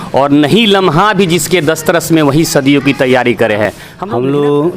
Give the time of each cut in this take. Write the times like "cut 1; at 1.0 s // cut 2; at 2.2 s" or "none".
cut 1; at 3.8 s